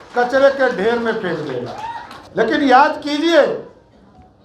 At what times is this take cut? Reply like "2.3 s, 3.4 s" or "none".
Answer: 2.1 s